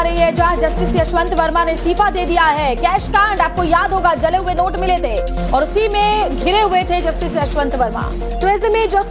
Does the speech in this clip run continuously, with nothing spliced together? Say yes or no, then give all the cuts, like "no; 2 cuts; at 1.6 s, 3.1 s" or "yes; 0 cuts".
yes; 0 cuts